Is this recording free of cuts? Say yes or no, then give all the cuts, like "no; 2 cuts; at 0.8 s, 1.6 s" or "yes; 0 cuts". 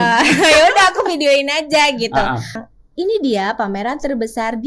no; 1 cut; at 2.7 s